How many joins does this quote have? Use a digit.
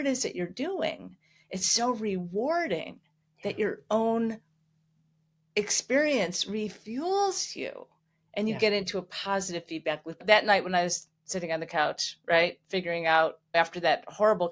2